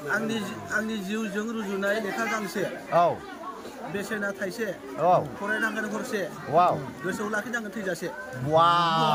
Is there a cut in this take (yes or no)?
no